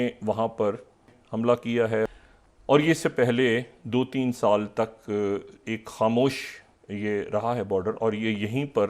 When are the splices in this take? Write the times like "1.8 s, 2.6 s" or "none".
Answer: 1.1 s, 2.1 s

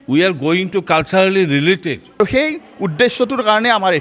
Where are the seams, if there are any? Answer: 2.2 s

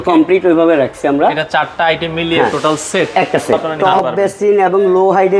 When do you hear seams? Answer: 3.7 s

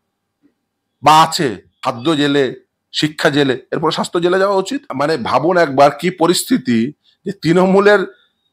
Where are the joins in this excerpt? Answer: 1.7 s, 4.9 s

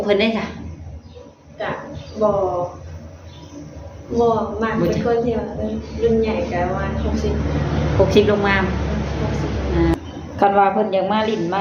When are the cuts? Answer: 9.9 s

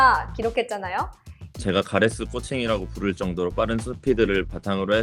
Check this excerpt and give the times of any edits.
1.6 s

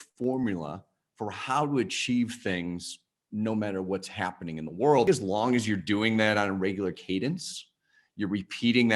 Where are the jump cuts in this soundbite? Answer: 5.1 s

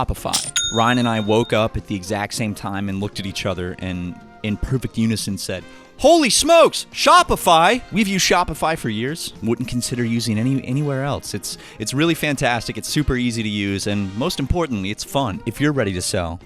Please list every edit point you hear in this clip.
7.9 s, 15.4 s

